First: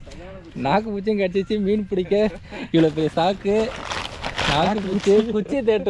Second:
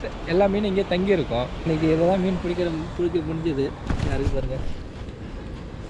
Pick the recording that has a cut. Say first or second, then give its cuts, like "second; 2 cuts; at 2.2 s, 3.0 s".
second; 1 cut; at 1.7 s